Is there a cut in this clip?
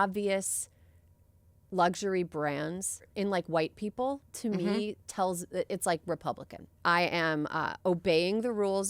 yes; 2 cuts; at 3.1 s, 6.7 s

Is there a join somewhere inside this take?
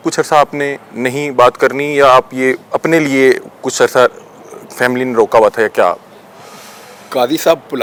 no; 0 cuts

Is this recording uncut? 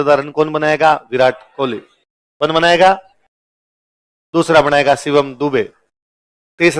yes; 0 cuts

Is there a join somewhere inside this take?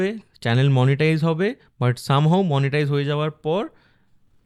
no; 0 cuts

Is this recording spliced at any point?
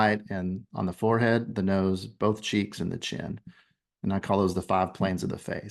no; 0 cuts

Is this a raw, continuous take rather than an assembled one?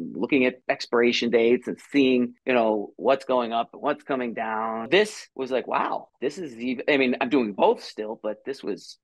no; 1 cut; at 4.9 s

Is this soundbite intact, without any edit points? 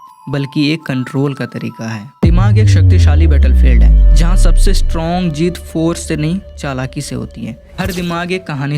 no; 2 cuts; at 2.2 s, 7.6 s

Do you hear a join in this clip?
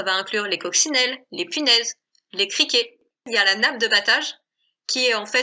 yes; 1 cut; at 3.1 s

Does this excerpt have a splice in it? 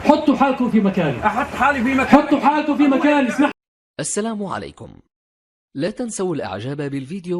yes; 1 cut; at 3.5 s

